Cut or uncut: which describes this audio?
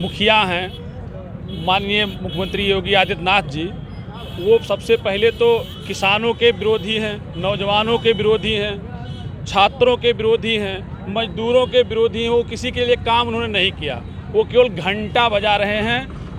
uncut